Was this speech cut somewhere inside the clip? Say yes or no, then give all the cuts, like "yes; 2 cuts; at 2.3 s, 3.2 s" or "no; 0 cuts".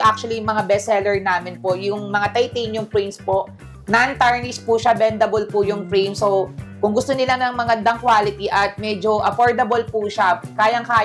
no; 0 cuts